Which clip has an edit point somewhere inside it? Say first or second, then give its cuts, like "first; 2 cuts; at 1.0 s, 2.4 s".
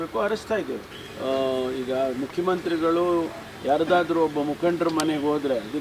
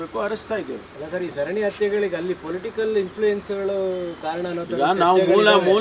first; 1 cut; at 0.9 s